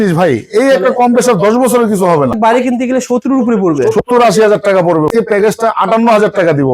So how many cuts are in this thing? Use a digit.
2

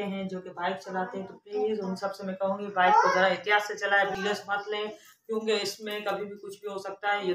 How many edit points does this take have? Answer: 1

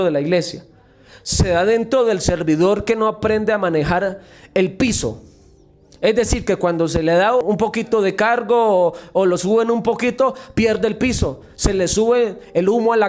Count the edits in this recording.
1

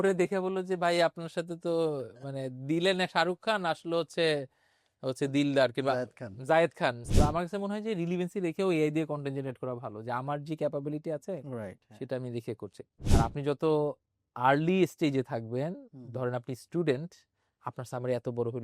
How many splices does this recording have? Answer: 2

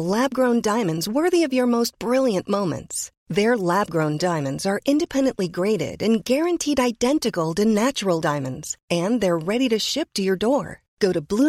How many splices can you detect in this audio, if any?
0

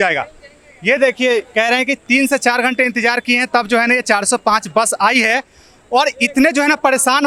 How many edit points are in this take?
0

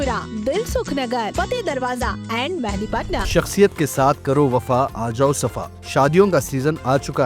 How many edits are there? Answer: 1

